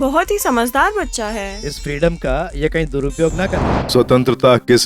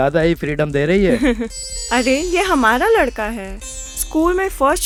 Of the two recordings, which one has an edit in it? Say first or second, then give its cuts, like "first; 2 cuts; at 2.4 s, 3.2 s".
first; 1 cut; at 3.6 s